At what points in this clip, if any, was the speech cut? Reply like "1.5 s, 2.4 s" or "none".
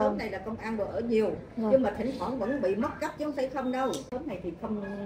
4.1 s